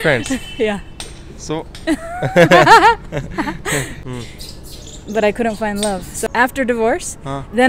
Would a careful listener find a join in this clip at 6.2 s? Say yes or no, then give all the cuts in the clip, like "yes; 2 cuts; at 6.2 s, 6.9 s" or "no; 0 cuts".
yes; 2 cuts; at 4.0 s, 6.2 s